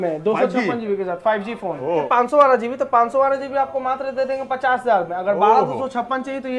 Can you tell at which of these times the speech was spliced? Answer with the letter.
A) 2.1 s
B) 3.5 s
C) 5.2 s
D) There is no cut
A